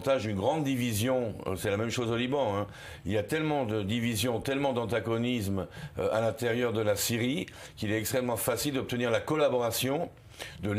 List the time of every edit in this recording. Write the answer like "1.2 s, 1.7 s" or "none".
none